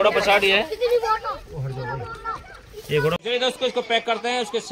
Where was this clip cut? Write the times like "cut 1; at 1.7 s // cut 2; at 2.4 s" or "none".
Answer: cut 1; at 3.2 s